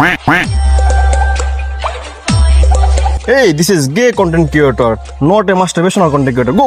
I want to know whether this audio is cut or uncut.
uncut